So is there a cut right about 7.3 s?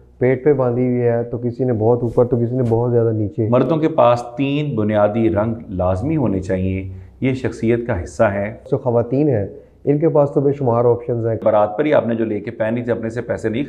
no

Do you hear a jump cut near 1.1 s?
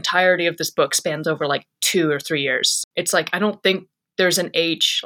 no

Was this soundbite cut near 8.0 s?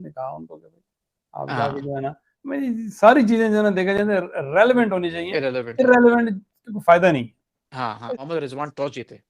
yes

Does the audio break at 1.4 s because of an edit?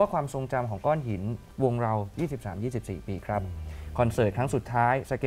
yes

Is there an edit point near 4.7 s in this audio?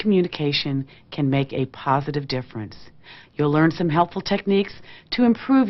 no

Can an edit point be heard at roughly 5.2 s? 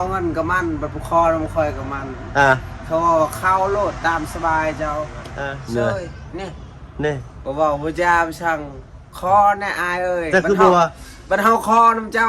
yes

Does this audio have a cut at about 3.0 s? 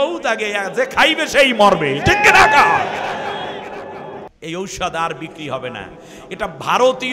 no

